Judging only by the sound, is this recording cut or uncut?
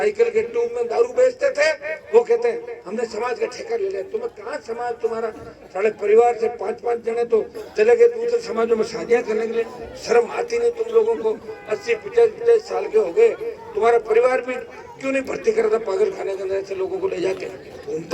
uncut